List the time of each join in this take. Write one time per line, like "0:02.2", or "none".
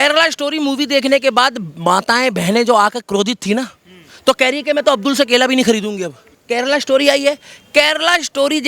0:06.4